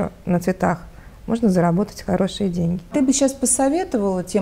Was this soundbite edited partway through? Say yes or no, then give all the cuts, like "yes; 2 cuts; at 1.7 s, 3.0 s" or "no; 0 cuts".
yes; 1 cut; at 2.9 s